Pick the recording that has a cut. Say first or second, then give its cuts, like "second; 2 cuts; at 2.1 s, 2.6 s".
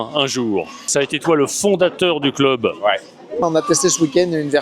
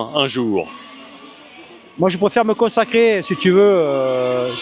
first; 2 cuts; at 0.8 s, 3.4 s